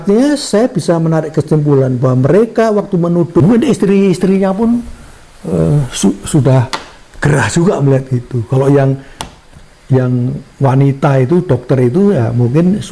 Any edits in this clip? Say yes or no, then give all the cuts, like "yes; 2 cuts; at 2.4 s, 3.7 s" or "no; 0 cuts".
yes; 1 cut; at 3.4 s